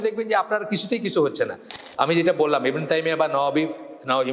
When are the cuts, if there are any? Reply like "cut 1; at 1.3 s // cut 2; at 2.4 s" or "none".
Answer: cut 1; at 1.7 s